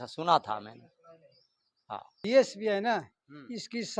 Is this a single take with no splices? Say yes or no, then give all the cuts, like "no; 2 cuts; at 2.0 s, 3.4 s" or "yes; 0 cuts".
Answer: no; 1 cut; at 2.2 s